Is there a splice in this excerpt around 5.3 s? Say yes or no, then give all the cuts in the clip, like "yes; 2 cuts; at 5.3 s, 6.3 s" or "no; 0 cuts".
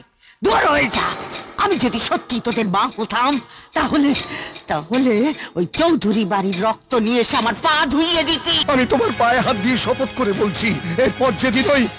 no; 1 cut; at 8.5 s